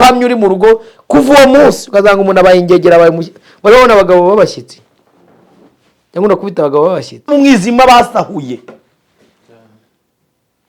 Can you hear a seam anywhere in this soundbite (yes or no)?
yes